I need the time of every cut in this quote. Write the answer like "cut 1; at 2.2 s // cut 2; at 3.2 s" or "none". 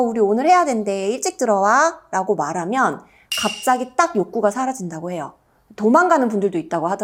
none

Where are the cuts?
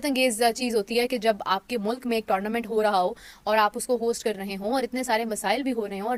none

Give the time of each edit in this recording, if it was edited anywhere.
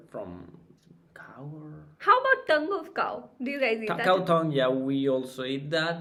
none

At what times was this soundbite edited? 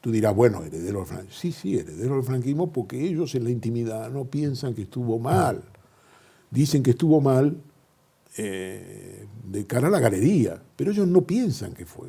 none

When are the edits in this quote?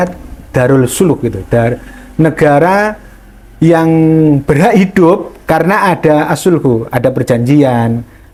none

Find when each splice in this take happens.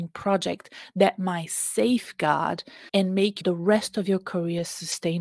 cut 1; at 2.7 s // cut 2; at 3.4 s

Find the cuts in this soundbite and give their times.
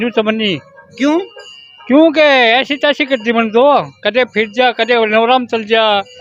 none

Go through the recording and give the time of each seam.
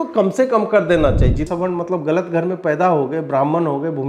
cut 1; at 1.5 s

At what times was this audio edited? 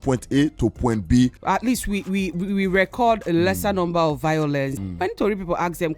cut 1; at 1.4 s // cut 2; at 4.8 s

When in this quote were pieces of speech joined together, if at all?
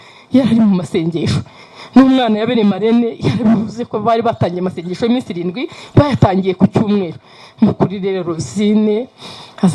none

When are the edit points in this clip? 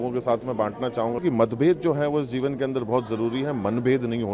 cut 1; at 1.2 s

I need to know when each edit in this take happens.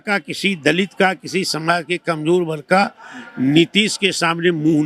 none

